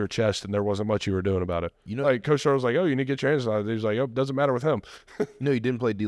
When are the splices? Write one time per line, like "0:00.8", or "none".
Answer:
none